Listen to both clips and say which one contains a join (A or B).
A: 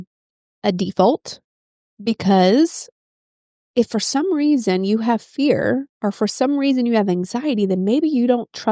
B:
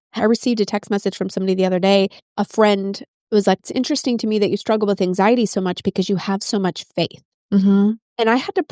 B